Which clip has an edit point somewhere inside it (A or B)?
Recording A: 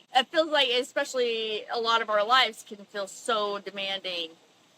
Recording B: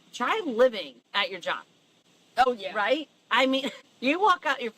B